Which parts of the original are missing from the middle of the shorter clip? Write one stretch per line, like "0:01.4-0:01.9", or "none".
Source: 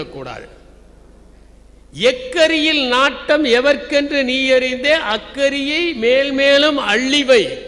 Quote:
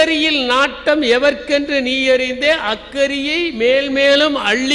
none